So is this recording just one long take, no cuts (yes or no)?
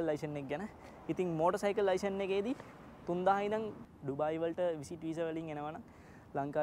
no